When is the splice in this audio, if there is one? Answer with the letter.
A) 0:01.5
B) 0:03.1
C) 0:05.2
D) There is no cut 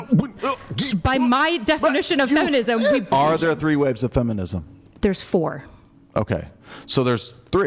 B